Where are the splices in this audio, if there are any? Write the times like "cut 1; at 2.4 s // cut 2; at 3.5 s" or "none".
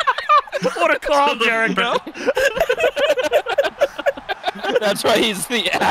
cut 1; at 4.6 s